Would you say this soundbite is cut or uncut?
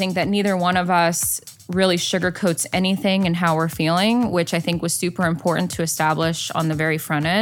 uncut